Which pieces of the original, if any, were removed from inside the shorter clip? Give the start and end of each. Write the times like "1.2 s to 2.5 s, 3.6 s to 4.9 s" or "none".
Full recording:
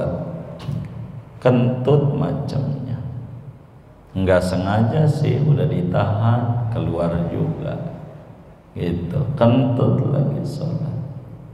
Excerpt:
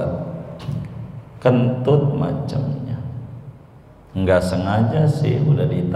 none